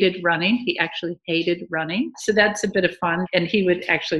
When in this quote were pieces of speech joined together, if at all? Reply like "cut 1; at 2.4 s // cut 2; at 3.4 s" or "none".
cut 1; at 2.2 s // cut 2; at 3.2 s